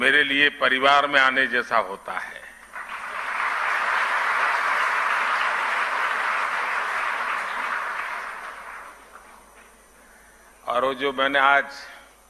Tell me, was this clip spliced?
no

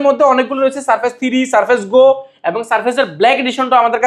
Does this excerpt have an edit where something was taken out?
no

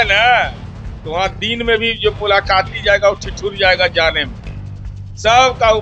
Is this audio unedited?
yes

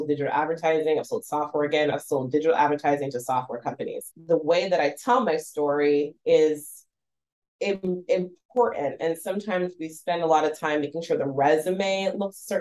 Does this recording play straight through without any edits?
no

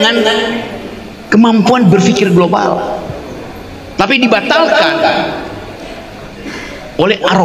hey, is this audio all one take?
yes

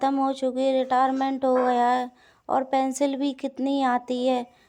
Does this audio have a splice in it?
no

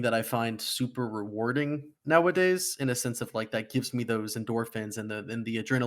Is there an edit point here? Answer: yes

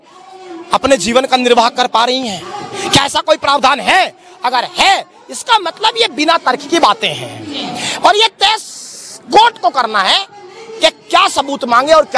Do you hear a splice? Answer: no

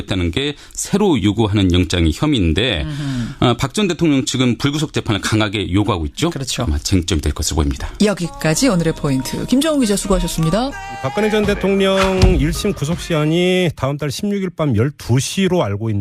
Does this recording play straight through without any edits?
no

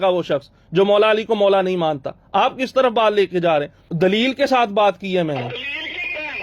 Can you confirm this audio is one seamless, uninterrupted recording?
no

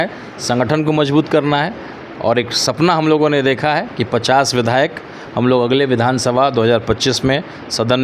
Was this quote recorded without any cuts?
yes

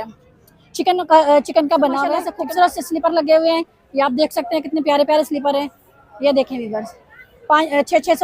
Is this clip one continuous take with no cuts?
no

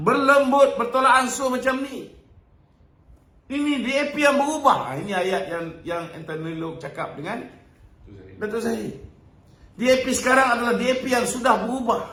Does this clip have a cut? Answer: no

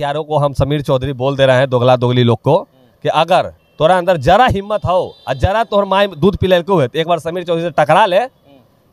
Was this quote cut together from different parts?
no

